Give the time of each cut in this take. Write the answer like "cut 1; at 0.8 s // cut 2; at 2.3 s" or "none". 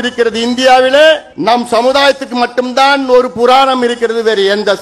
cut 1; at 1.3 s